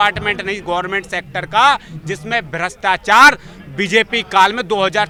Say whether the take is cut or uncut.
uncut